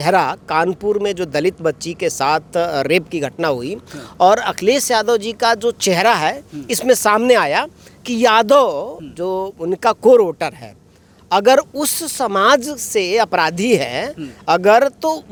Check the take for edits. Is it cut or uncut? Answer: uncut